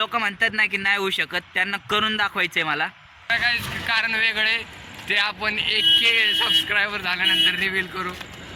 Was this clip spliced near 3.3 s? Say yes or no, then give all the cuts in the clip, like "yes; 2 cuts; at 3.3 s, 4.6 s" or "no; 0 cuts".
yes; 1 cut; at 3.3 s